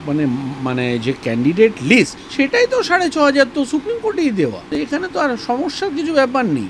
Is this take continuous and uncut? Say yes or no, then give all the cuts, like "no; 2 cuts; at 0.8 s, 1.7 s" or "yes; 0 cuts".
no; 2 cuts; at 2.2 s, 4.8 s